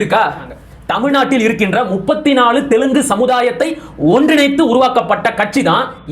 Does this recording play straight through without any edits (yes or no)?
no